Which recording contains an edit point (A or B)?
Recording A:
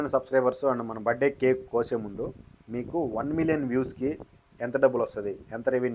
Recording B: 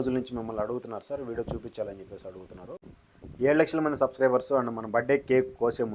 B